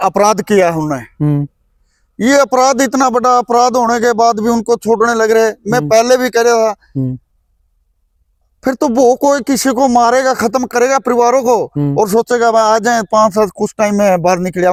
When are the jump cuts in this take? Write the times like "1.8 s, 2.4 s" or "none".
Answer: none